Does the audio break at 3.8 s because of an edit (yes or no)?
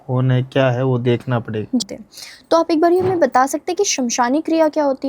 no